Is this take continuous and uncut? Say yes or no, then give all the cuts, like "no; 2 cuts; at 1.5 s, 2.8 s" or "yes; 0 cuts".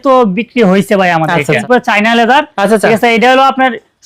no; 1 cut; at 1.6 s